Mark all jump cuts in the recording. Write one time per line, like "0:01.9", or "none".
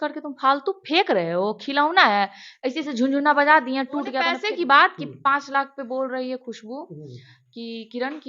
0:04.4